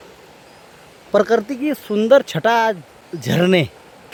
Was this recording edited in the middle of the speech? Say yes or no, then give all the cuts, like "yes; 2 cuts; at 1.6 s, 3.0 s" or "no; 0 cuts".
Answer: no; 0 cuts